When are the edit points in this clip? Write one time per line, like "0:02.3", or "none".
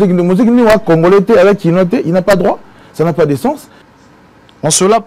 0:03.8